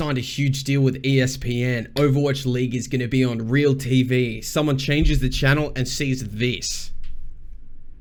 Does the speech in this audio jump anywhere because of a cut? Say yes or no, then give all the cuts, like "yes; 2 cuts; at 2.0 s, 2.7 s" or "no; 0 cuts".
no; 0 cuts